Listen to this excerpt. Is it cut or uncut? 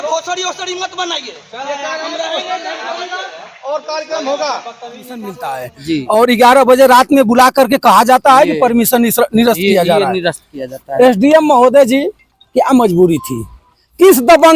cut